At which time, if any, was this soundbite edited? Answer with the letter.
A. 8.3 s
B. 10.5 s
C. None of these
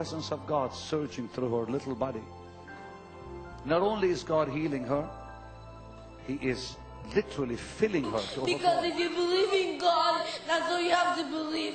A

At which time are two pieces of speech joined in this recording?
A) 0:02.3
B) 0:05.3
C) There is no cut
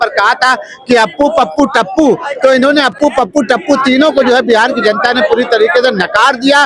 C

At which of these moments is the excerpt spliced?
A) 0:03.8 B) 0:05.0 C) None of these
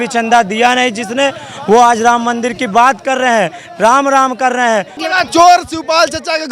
B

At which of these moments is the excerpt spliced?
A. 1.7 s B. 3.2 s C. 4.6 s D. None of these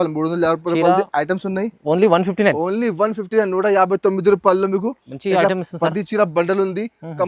D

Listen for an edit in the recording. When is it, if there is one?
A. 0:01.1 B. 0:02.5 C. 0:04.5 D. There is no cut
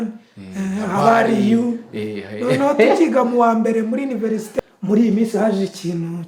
C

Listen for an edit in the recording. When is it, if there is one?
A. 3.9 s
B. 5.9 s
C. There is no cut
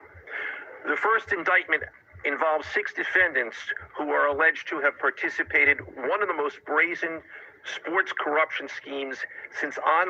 C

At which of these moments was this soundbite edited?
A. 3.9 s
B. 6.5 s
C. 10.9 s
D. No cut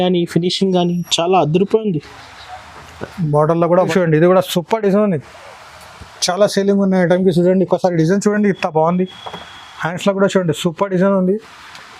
A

